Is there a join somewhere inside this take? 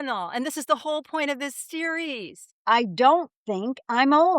yes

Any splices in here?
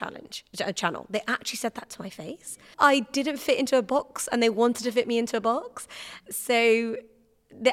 yes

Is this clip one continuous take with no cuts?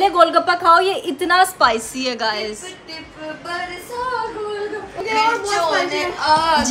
yes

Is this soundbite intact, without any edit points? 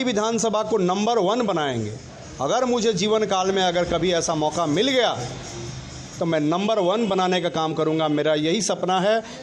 yes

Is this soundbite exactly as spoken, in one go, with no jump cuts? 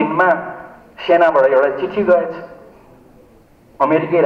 yes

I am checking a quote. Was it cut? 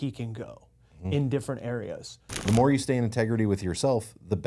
yes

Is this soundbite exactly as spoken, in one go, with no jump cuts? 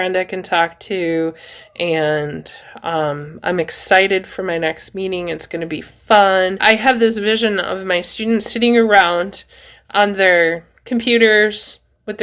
no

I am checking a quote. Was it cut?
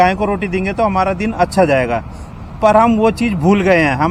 no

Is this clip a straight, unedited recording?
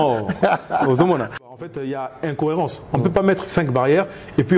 no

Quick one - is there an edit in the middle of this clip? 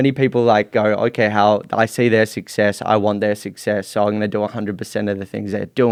no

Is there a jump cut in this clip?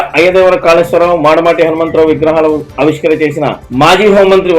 no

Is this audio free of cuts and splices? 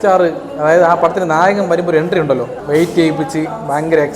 no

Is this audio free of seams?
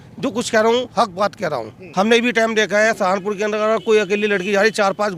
no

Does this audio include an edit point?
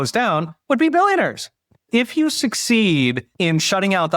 yes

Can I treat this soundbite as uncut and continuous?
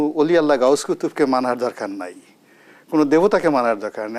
yes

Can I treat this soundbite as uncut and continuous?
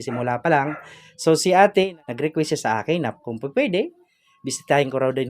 no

